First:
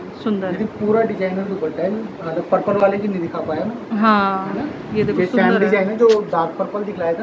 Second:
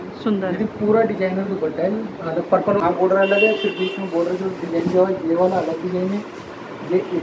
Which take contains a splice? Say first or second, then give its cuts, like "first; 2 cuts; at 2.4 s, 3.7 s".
second; 1 cut; at 2.8 s